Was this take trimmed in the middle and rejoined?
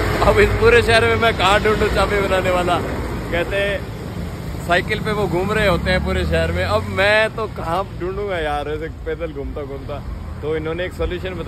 no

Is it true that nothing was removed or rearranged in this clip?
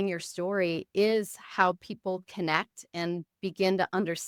yes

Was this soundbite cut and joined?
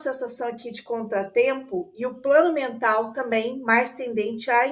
no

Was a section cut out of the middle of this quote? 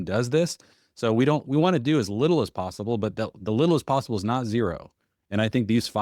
no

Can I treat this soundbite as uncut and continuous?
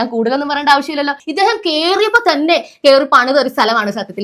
no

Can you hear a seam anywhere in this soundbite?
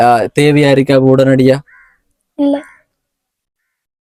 no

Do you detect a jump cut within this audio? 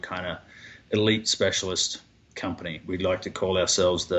no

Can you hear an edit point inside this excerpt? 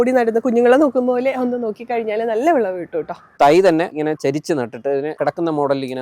yes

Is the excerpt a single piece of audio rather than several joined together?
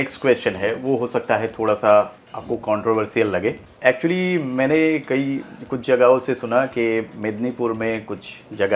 yes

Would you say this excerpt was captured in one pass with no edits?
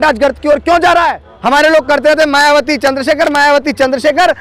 no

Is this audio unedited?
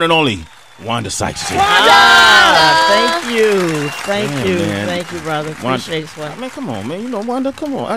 yes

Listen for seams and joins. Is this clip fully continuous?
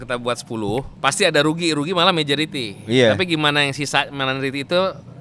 no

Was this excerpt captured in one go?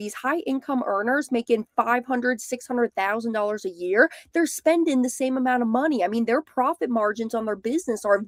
yes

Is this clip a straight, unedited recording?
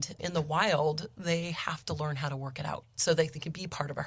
no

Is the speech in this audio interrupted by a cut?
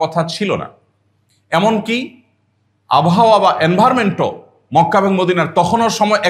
no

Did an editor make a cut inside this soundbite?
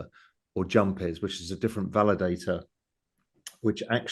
no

